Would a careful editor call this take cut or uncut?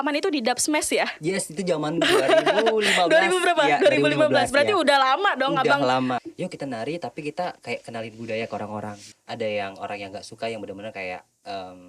cut